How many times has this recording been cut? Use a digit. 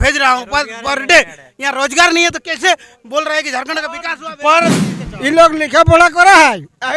1